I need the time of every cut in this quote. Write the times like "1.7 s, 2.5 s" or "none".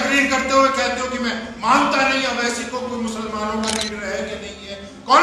none